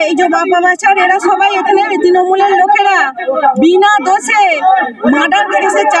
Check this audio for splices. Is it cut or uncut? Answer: uncut